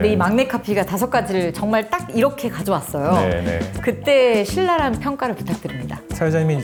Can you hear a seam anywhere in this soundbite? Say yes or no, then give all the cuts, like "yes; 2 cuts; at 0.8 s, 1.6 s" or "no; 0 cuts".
no; 0 cuts